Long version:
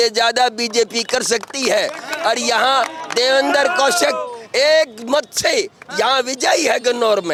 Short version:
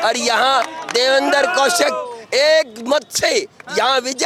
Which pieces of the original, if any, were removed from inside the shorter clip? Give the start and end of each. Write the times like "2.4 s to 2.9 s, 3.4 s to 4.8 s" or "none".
none